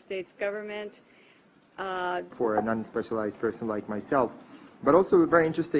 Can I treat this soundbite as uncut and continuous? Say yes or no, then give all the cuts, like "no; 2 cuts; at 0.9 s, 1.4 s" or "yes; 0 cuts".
yes; 0 cuts